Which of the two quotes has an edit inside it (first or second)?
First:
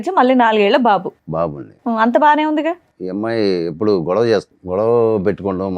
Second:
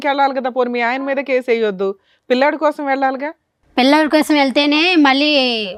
first